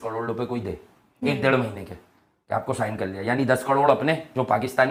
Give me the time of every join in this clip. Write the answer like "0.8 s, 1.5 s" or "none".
none